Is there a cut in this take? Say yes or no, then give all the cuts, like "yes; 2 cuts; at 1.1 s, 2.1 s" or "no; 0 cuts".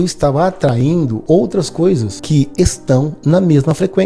yes; 2 cuts; at 1.2 s, 2.1 s